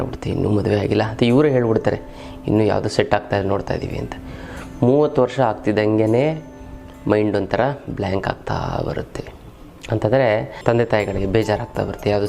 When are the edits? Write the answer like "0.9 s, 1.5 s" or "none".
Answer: 10.6 s